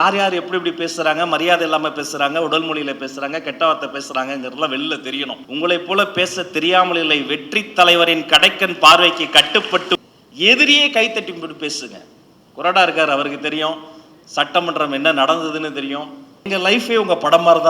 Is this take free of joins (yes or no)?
no